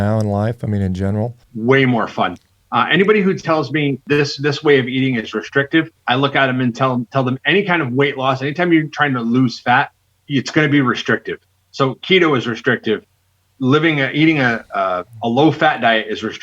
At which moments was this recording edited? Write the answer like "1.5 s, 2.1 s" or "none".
1.4 s, 4.0 s, 6.0 s